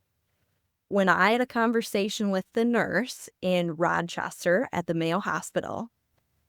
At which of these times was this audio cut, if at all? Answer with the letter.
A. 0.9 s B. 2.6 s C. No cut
A